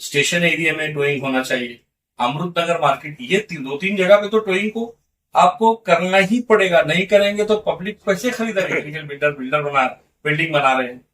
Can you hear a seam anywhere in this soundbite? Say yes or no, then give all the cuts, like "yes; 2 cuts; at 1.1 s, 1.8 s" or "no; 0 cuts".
yes; 1 cut; at 8.8 s